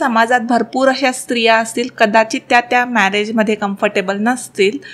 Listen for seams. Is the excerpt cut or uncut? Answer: uncut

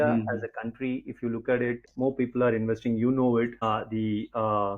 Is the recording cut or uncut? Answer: cut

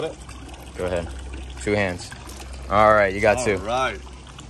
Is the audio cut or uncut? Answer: uncut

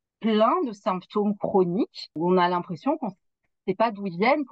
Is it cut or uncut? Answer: cut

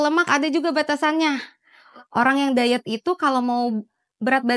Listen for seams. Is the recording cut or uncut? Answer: cut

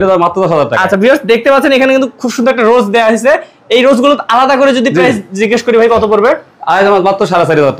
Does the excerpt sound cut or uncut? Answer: uncut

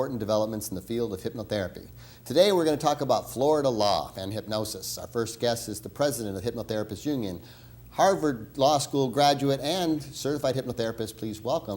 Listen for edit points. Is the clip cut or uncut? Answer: cut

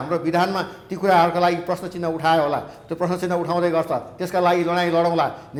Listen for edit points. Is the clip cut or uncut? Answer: uncut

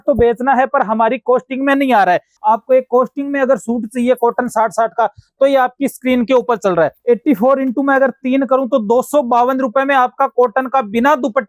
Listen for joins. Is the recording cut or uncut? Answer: cut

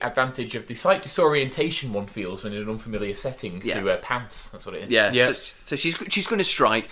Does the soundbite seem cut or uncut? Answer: uncut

